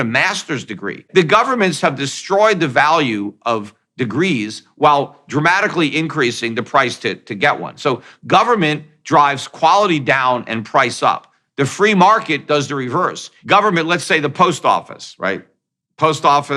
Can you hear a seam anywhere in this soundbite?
yes; 2 cuts; at 1.0 s, 13.3 s

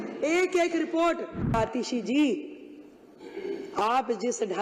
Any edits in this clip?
yes; 1 cut; at 1.5 s

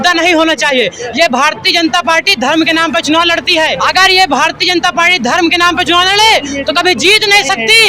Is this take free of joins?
no; 1 cut; at 3.8 s

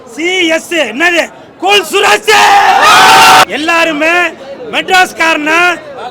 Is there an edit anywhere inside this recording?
yes; 1 cut; at 3.4 s

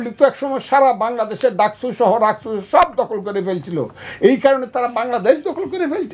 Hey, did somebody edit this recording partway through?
no; 0 cuts

